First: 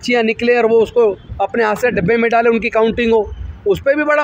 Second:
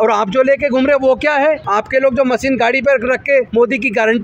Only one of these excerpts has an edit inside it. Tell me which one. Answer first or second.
second